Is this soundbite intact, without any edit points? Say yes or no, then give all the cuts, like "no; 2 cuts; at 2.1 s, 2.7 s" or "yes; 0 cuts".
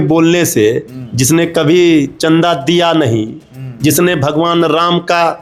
yes; 0 cuts